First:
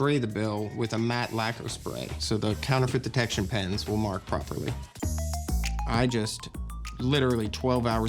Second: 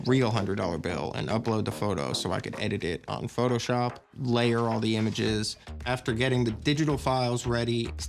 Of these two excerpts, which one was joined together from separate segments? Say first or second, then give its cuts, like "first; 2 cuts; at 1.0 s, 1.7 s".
first; 1 cut; at 4.9 s